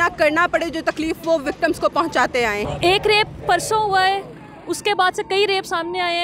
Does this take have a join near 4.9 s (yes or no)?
no